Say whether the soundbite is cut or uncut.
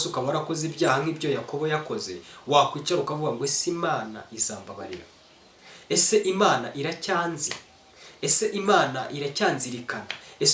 uncut